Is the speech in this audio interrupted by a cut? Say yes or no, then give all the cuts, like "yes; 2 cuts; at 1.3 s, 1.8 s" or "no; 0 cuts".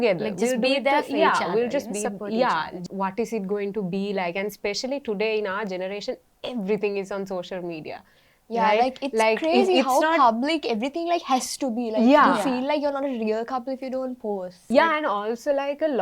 yes; 2 cuts; at 2.8 s, 14.6 s